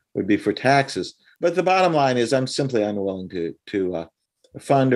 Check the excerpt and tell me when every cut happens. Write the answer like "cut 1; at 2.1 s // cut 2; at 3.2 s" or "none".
cut 1; at 1.2 s